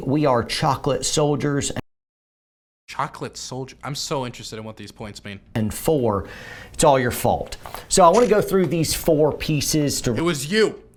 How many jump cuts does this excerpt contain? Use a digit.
0